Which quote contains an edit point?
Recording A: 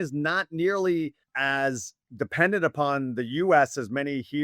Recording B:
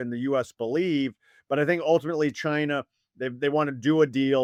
A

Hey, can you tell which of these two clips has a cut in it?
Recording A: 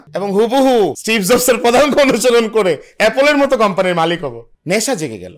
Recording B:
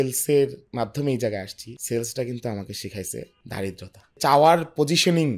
B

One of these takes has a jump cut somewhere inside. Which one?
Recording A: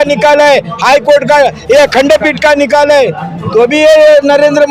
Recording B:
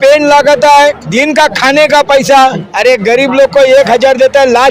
B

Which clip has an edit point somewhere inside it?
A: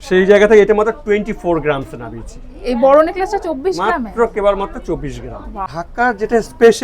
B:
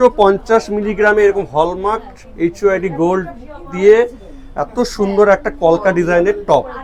A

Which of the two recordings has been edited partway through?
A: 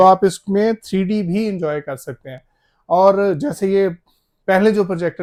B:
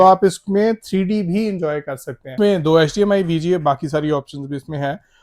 B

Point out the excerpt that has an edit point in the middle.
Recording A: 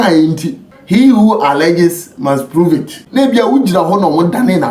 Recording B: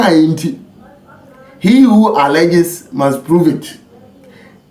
A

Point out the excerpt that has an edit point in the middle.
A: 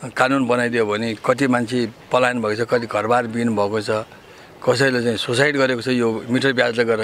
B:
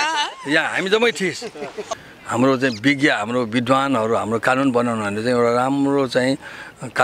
B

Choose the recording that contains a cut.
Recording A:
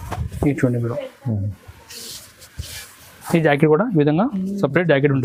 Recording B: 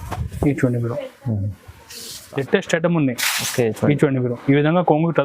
B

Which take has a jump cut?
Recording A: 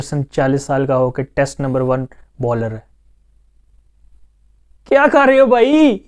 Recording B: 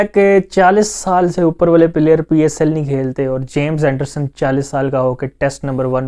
B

